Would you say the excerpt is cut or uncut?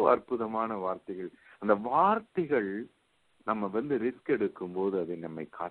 uncut